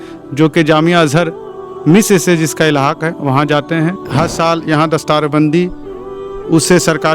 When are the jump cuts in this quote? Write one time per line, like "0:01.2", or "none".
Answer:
0:04.0